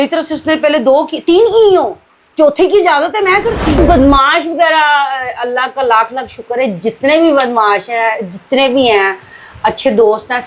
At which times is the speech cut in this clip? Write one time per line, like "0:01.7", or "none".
0:03.8